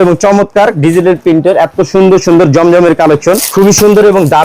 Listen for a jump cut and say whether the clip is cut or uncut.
cut